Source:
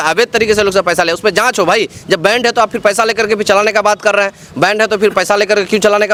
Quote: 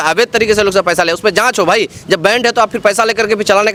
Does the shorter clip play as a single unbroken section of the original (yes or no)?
yes